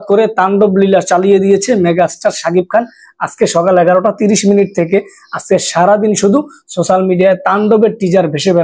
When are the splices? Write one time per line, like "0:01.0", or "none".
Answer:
none

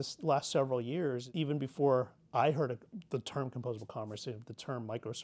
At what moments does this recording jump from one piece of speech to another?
0:01.3

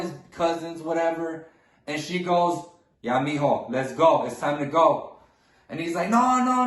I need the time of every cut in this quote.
none

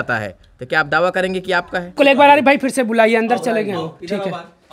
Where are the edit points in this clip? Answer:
0:02.0

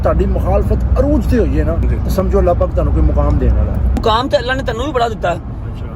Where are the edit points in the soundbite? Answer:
0:01.9
0:04.0

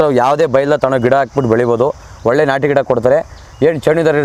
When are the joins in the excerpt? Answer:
none

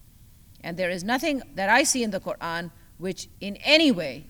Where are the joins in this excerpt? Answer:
0:03.3

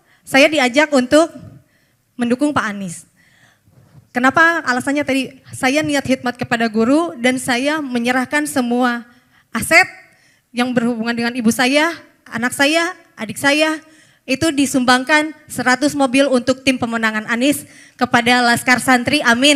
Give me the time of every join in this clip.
none

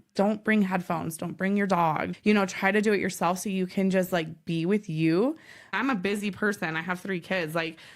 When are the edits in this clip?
0:02.1
0:05.8

